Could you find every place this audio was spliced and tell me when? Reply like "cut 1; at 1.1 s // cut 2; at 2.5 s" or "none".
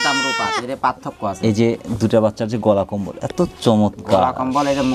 none